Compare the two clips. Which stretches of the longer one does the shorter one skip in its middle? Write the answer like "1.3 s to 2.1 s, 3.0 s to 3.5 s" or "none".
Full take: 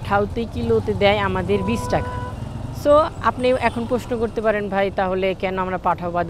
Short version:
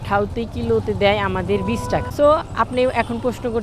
2.1 s to 2.7 s